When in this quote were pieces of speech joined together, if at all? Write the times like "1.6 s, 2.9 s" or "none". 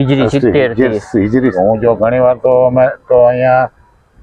1.5 s

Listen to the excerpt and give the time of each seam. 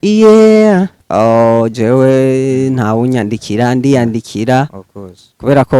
1.0 s

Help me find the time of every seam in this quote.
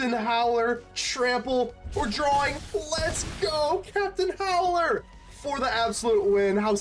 none

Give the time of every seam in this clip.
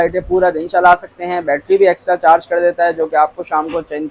none

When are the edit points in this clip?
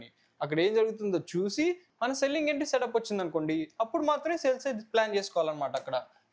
none

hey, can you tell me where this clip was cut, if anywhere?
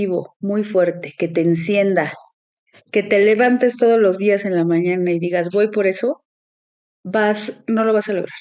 none

